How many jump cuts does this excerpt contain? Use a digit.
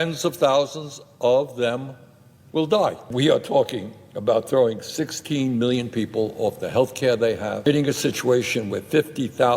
2